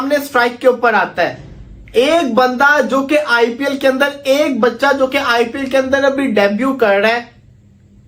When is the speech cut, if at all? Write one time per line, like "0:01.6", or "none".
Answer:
none